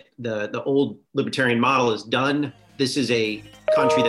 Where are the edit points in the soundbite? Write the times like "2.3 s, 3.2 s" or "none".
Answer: 1.0 s, 2.6 s